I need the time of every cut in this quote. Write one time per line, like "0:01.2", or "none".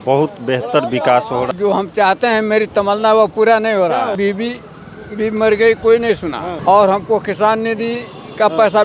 0:01.5
0:04.2
0:06.5